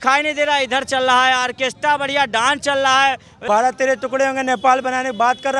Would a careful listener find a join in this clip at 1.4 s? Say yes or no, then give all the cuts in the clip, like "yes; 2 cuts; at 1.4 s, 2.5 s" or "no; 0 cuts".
no; 1 cut; at 3.4 s